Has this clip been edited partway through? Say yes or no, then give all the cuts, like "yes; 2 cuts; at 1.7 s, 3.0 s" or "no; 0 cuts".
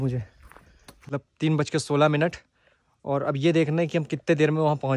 yes; 1 cut; at 0.9 s